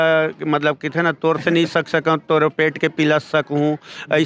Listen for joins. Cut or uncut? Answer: uncut